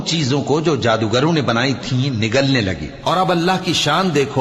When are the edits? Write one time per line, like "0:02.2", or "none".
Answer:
0:02.9